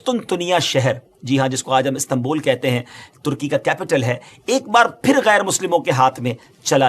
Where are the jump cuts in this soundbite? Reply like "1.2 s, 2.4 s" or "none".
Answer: none